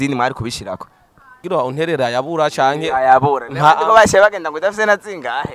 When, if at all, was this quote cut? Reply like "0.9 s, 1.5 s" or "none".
1.4 s

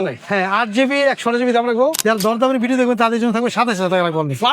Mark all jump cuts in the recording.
2.0 s

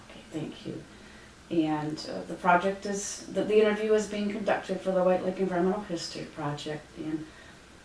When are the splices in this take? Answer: none

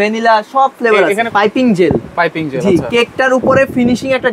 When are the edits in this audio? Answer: 1.2 s

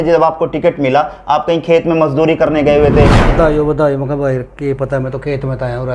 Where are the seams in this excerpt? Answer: 3.3 s

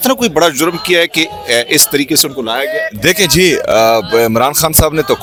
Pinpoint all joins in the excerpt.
none

